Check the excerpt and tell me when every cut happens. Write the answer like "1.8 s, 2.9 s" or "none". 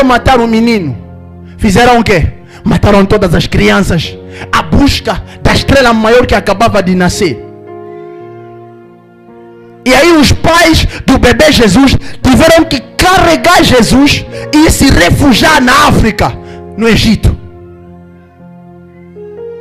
none

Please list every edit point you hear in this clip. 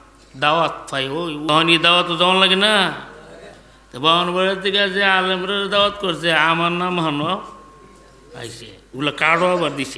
1.5 s

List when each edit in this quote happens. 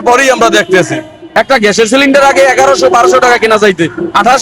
1.2 s

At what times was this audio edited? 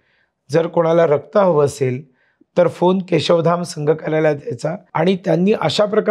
4.8 s

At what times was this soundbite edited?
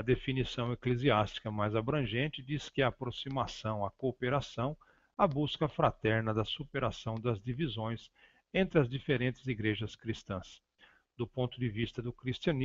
9.8 s

